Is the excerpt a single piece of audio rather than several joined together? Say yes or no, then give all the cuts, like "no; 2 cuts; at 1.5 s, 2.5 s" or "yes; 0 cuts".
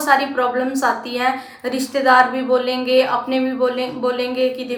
yes; 0 cuts